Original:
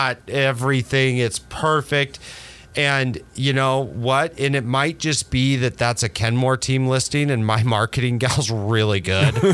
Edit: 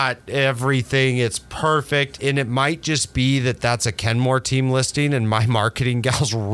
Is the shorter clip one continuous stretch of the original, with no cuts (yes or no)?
no